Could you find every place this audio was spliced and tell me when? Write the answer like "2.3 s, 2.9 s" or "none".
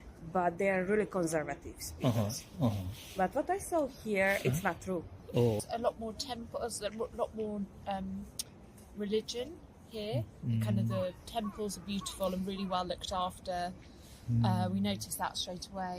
5.6 s